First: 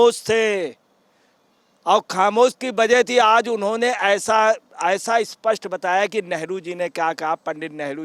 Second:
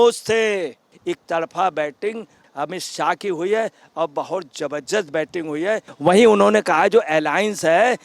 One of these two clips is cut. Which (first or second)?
second